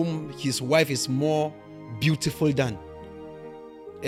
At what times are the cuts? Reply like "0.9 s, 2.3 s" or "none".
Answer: none